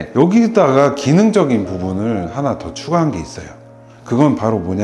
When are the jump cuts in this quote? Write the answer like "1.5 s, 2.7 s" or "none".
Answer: none